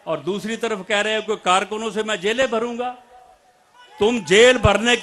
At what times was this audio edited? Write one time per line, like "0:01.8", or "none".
none